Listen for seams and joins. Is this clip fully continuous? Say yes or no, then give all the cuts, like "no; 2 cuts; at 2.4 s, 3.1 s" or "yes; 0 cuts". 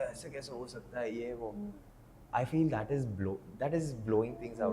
yes; 0 cuts